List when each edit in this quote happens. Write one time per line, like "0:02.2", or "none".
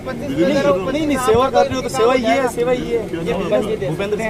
none